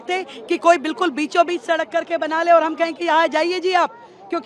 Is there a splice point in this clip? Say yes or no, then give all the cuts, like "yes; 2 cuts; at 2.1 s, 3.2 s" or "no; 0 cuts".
no; 0 cuts